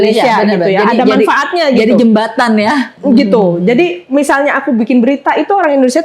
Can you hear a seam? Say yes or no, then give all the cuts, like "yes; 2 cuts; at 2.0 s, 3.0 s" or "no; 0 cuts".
no; 0 cuts